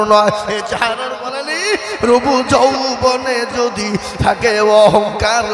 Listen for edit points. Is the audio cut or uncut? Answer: cut